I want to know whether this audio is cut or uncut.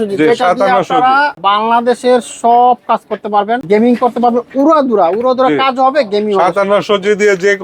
cut